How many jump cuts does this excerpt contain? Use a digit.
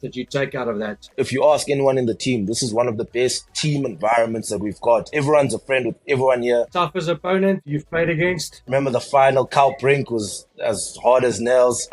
3